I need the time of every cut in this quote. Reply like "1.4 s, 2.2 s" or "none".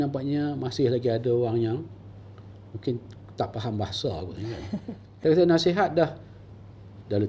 5.0 s